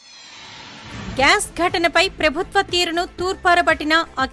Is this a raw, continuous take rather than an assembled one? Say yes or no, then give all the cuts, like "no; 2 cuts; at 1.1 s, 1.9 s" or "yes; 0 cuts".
no; 1 cut; at 1.0 s